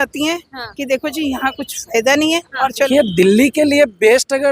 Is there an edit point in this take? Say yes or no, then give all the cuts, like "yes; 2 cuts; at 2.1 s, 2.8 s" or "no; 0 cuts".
yes; 1 cut; at 2.9 s